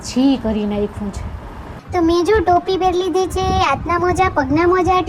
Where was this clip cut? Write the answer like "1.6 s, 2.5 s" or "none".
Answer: 1.7 s